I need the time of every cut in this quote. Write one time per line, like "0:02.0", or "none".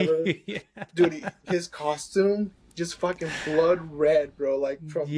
none